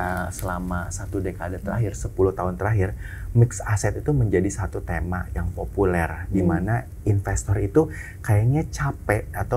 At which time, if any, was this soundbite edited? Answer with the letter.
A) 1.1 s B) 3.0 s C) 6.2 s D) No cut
D